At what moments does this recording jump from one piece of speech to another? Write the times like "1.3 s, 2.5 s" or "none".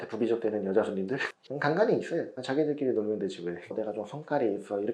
3.6 s